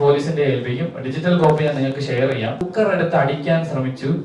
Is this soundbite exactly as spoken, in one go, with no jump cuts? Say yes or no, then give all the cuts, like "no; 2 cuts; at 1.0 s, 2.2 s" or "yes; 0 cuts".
no; 1 cut; at 2.7 s